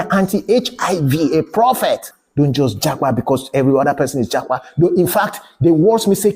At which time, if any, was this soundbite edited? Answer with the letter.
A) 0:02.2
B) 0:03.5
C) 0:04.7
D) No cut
A